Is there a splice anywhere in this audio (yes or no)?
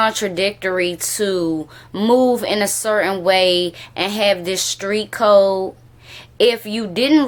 no